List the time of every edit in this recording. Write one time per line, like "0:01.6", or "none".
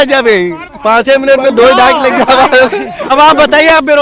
0:03.1